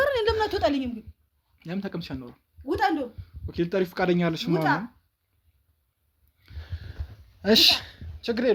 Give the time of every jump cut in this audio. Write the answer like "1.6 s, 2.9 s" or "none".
none